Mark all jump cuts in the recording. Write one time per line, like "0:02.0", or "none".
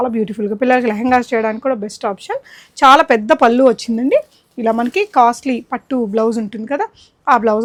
none